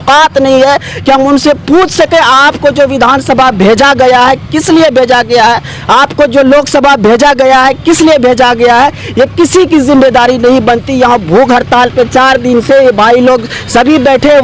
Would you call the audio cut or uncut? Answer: uncut